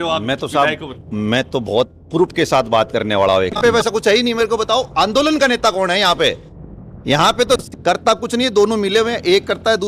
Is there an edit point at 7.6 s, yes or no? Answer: yes